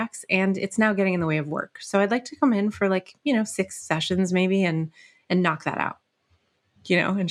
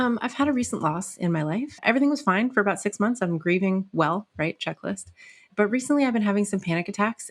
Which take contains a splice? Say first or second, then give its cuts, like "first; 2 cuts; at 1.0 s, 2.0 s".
second; 2 cuts; at 1.8 s, 5.5 s